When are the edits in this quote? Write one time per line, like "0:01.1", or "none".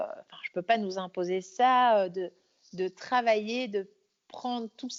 none